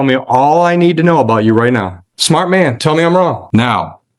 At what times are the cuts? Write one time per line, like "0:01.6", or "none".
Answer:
0:02.1
0:03.4

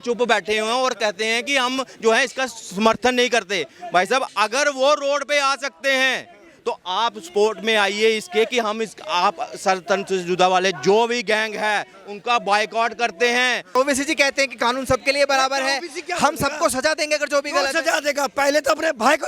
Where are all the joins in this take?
0:13.7

